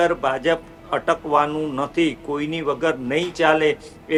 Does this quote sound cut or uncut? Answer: uncut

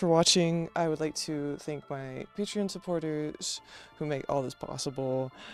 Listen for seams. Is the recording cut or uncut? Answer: uncut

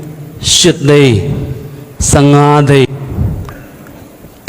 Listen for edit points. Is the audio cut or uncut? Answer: cut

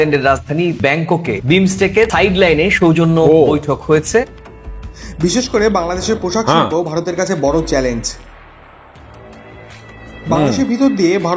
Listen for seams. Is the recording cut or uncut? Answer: cut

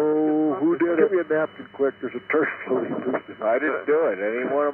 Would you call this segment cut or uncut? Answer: cut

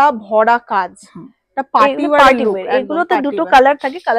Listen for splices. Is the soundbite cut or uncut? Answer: uncut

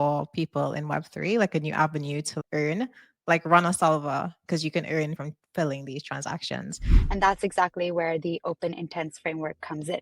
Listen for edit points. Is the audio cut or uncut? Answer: cut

